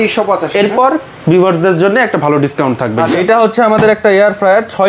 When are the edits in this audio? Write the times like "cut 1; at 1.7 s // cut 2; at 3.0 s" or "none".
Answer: cut 1; at 3.1 s